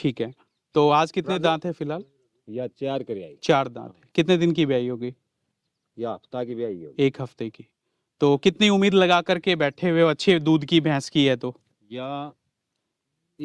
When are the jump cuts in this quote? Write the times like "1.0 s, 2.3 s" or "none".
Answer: none